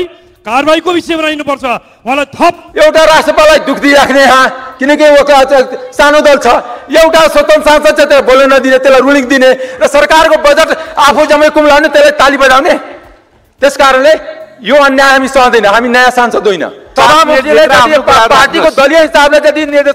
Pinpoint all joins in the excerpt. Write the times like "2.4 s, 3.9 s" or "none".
2.6 s, 16.8 s